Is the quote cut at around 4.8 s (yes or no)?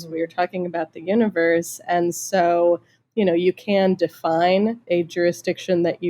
yes